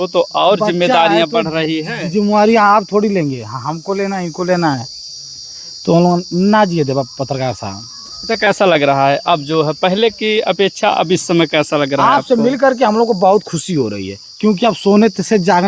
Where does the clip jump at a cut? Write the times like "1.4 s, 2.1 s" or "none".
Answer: none